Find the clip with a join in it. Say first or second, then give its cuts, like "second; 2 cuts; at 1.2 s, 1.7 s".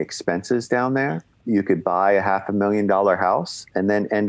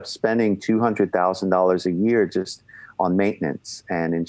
first; 1 cut; at 1.3 s